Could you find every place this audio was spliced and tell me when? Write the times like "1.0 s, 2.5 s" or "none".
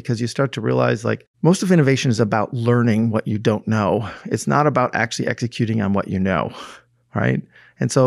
1.3 s